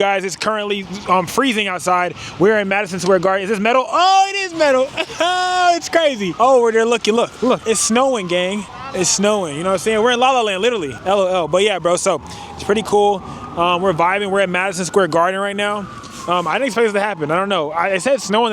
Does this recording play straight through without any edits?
no; 4 cuts; at 6.3 s, 7.6 s, 8.8 s, 10.9 s

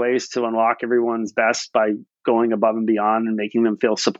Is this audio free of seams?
yes; 0 cuts

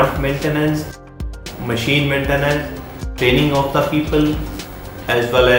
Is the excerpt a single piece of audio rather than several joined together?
no; 2 cuts; at 1.0 s, 3.1 s

